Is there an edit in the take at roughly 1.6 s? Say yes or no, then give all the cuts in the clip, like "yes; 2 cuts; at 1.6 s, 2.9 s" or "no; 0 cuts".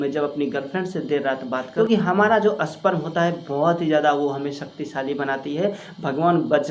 yes; 1 cut; at 1.6 s